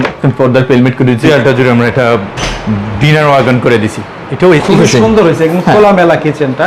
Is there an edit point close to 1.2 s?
yes; 2 cuts; at 1.2 s, 4.6 s

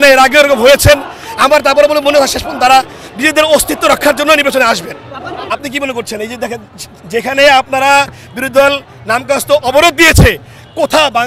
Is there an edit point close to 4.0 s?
no; 1 cut; at 5.3 s

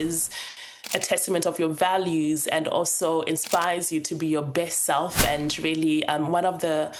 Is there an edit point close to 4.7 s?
no; 0 cuts

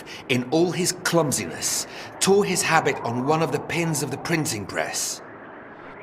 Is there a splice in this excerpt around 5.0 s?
yes; 1 cut; at 5.0 s

